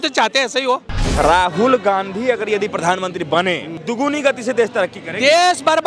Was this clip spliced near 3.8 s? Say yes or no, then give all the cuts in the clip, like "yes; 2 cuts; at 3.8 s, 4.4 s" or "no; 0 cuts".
yes; 2 cuts; at 1.0 s, 3.8 s